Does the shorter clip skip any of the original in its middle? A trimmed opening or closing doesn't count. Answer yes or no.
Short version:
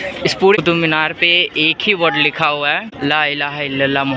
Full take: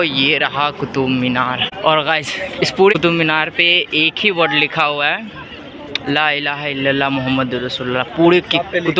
yes